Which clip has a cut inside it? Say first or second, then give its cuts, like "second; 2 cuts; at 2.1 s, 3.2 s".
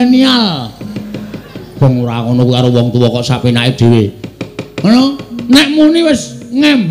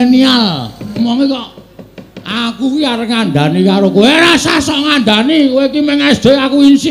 second; 1 cut; at 1.0 s